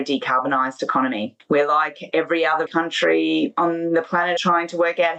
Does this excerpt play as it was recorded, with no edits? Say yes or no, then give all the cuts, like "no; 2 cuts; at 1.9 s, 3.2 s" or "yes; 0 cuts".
no; 4 cuts; at 1.3 s, 2.7 s, 3.5 s, 4.4 s